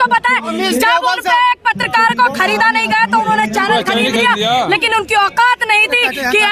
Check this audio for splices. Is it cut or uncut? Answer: uncut